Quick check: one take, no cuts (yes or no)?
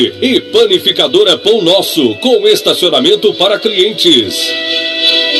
no